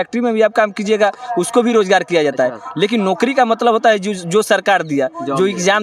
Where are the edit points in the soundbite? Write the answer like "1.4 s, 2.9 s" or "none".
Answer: none

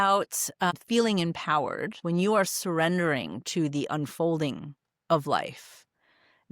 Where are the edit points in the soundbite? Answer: 0.7 s, 2.0 s

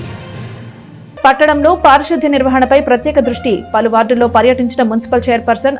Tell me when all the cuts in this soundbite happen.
1.2 s

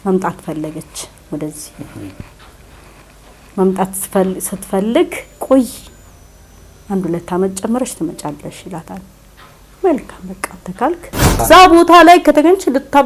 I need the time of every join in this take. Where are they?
11.4 s

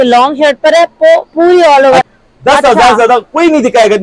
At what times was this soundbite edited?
2.0 s

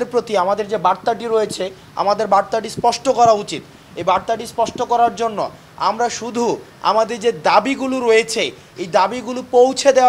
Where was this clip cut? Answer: none

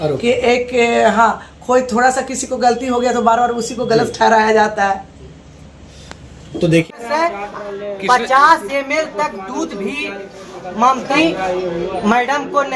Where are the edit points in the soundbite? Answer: 7.0 s, 11.1 s

